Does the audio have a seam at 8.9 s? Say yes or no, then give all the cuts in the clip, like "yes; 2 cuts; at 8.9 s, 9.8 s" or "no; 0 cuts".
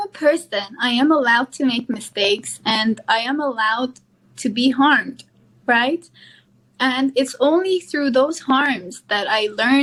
no; 0 cuts